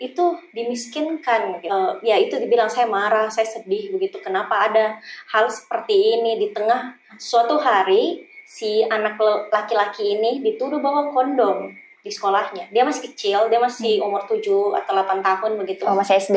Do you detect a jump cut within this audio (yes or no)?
yes